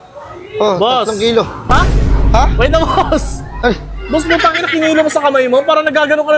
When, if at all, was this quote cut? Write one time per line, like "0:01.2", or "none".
none